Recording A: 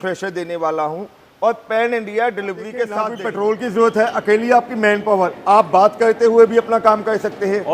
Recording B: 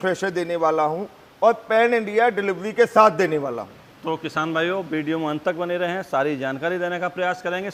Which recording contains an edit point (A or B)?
A